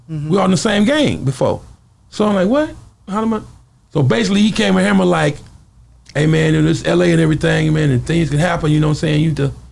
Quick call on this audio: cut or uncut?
uncut